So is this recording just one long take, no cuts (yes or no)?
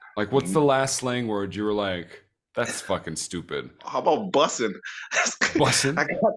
no